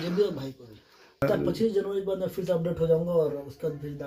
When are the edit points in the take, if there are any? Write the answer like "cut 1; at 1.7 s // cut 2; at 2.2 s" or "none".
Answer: cut 1; at 1.2 s